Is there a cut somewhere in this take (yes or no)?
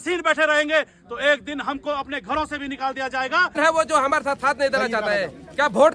yes